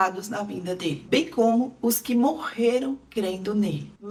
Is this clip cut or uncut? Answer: uncut